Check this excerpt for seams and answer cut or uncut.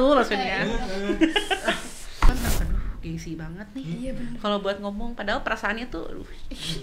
cut